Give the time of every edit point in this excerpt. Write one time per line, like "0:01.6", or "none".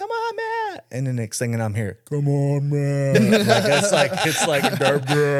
none